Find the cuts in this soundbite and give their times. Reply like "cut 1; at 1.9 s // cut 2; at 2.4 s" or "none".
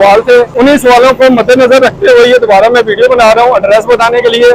none

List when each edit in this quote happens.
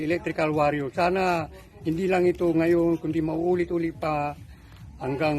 none

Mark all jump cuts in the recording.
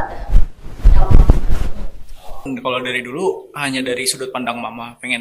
cut 1; at 2.5 s

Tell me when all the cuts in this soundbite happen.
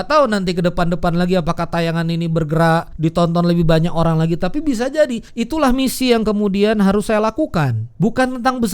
cut 1; at 2.9 s // cut 2; at 5.3 s // cut 3; at 7.8 s

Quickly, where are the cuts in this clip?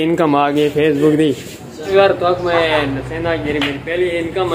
cut 1; at 1.9 s

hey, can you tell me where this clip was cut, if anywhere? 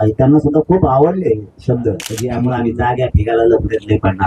cut 1; at 2.2 s

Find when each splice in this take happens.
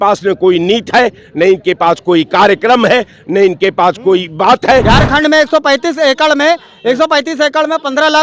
cut 1; at 4.8 s

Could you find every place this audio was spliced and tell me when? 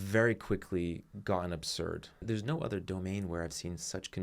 cut 1; at 2.2 s

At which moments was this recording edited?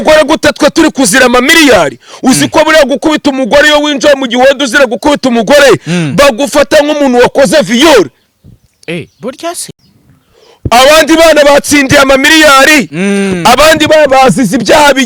none

